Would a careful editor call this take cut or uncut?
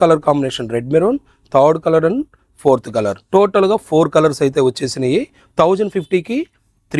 uncut